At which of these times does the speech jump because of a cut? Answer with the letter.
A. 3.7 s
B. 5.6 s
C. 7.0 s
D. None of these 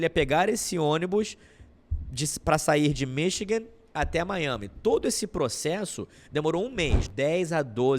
C